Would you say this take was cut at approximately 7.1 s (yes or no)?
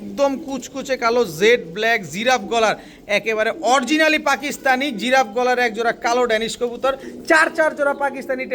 yes